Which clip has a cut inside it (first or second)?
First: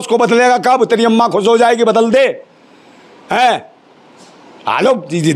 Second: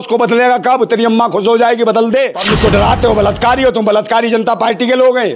second